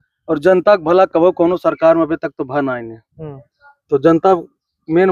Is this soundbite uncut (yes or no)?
yes